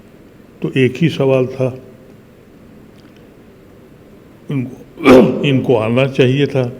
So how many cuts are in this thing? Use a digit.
0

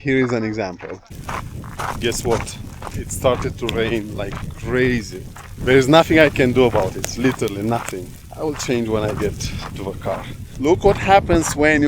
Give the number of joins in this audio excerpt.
1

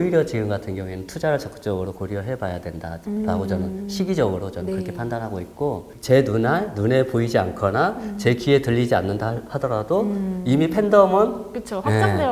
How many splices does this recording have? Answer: 1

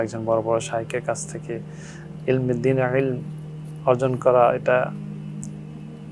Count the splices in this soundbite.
0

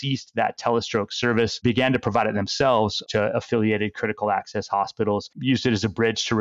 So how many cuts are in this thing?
1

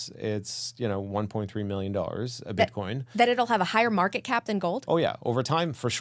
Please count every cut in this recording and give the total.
0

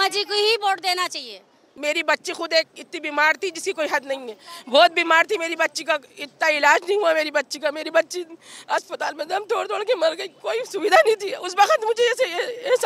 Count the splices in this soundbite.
1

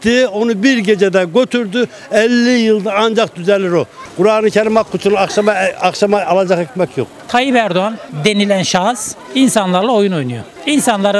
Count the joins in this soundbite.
2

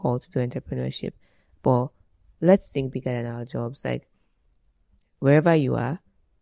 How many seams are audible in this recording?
0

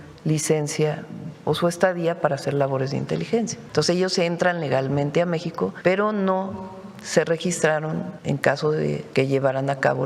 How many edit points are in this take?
4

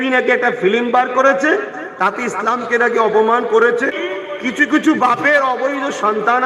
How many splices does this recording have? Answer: 1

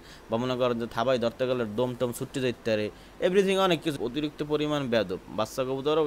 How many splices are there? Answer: 1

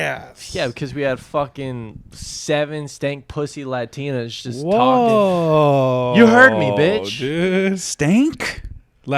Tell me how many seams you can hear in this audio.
0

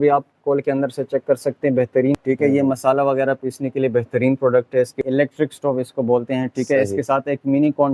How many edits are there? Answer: 2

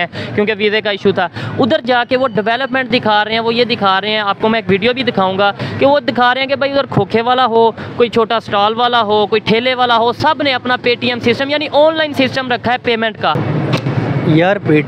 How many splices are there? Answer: 1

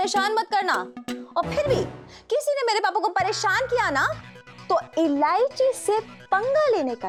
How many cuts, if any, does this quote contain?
0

